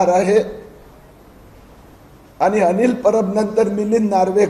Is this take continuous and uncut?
yes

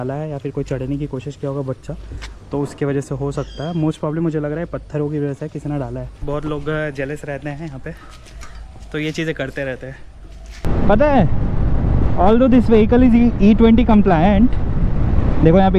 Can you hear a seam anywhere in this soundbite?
yes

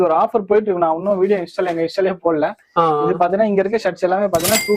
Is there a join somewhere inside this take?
no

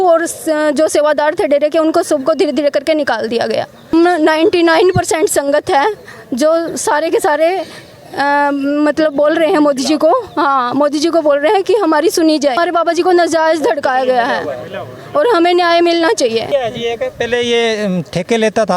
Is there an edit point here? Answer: yes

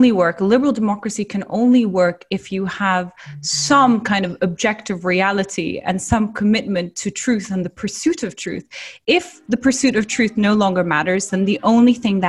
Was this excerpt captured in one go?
yes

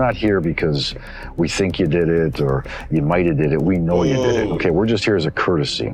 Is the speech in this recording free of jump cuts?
yes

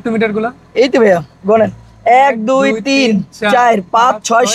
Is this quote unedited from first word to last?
yes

